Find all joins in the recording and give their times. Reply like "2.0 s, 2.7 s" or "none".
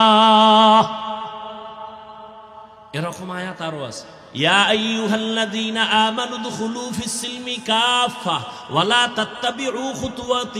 2.7 s